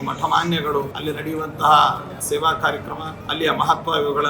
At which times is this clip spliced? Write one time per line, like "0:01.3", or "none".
0:00.9
0:02.2
0:03.2